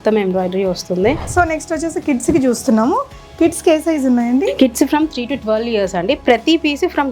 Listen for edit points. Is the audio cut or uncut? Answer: cut